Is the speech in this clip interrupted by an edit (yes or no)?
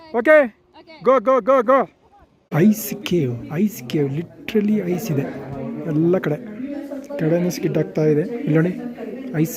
yes